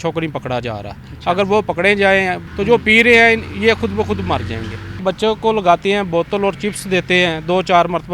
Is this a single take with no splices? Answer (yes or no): no